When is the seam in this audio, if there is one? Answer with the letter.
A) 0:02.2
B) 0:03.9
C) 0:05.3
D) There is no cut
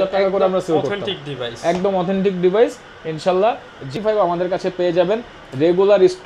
B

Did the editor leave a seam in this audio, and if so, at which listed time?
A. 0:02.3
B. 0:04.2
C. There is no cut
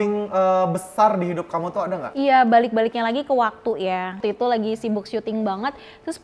B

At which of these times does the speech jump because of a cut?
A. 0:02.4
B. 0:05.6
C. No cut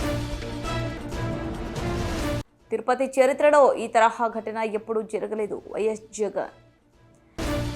A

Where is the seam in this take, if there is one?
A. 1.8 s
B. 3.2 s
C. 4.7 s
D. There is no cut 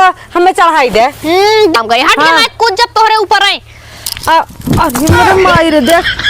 A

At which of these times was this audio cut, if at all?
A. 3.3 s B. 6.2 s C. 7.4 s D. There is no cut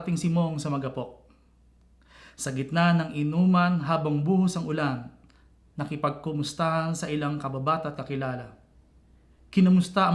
A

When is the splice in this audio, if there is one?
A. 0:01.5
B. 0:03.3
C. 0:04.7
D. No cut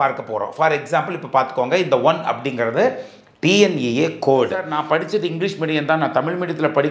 C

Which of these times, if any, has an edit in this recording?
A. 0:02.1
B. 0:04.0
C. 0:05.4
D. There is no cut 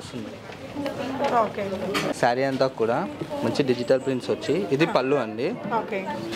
A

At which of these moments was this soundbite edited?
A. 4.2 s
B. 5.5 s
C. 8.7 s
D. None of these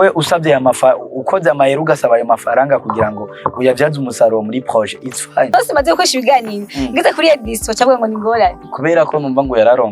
B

